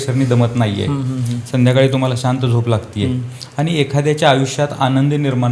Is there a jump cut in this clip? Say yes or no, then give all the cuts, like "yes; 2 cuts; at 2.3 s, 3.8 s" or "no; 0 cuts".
no; 0 cuts